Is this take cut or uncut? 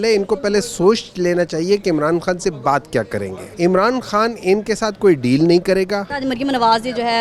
cut